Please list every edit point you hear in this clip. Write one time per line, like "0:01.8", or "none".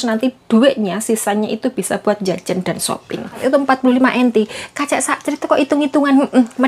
0:03.4